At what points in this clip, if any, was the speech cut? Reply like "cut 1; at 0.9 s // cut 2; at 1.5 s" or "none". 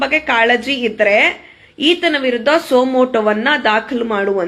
none